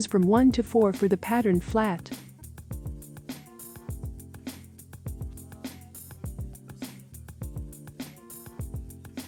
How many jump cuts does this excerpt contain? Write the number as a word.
zero